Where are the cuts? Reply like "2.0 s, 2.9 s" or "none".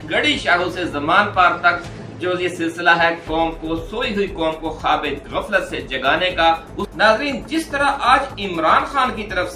6.9 s